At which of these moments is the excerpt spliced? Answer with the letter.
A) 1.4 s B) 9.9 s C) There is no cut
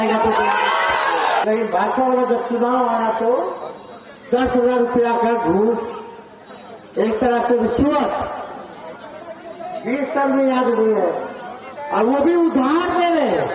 A